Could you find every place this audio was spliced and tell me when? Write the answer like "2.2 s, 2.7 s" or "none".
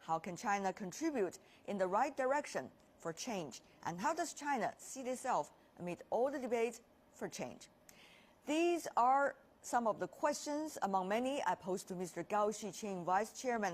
6.8 s